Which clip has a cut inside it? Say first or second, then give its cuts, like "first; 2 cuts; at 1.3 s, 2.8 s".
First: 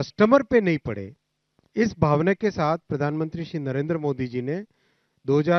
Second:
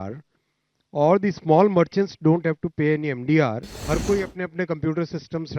second; 1 cut; at 3.7 s